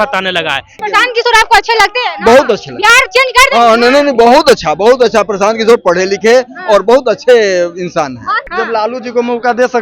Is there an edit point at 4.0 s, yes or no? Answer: no